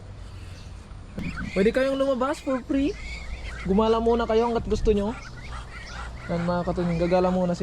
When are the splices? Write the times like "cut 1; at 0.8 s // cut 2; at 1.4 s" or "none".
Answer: cut 1; at 1.2 s